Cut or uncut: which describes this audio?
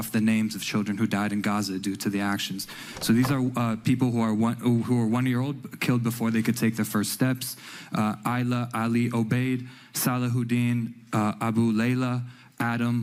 uncut